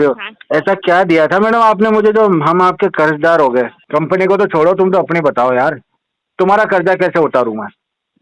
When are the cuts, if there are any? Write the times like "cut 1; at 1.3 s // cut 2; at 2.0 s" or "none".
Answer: cut 1; at 3.8 s